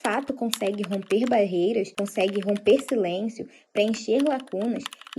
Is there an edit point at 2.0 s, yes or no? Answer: yes